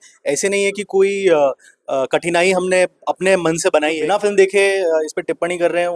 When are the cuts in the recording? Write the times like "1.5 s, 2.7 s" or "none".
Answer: 4.0 s